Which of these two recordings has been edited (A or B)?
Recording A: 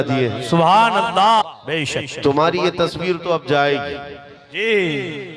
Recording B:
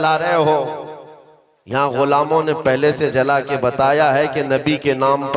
A